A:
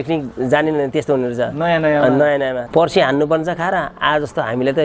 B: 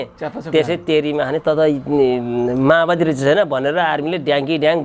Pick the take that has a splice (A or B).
A